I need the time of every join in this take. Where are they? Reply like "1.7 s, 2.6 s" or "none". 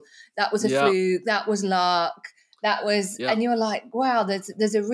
none